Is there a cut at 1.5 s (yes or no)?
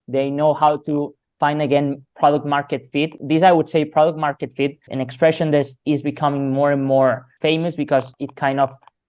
no